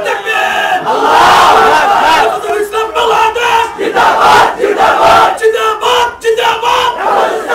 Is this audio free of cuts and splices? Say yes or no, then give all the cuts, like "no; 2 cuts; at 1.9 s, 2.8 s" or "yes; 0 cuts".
yes; 0 cuts